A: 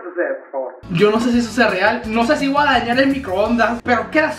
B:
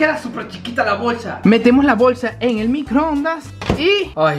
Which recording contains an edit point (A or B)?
B